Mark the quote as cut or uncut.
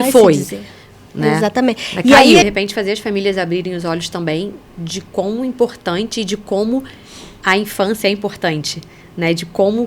cut